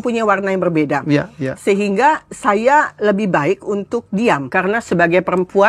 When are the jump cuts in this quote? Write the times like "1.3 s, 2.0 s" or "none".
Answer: 4.5 s